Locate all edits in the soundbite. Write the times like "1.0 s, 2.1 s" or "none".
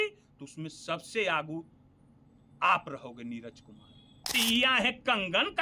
4.2 s

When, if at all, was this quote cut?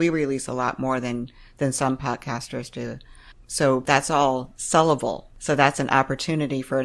3.8 s, 5.3 s

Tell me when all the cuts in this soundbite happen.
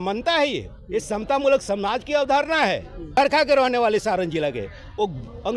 3.2 s

